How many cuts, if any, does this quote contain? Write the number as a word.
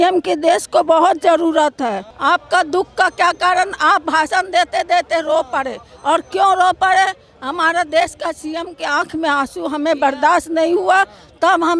one